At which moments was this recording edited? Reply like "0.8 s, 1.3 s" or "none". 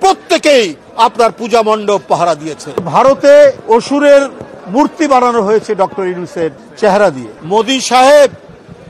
2.8 s, 3.6 s, 6.6 s, 7.3 s